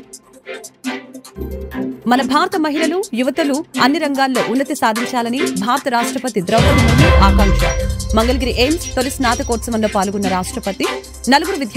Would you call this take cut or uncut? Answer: cut